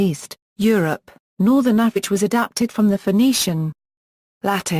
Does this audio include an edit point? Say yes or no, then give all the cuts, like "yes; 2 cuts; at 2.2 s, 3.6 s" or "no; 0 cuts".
no; 0 cuts